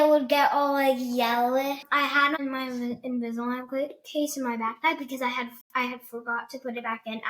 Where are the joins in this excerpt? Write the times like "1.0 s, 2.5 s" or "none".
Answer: 1.8 s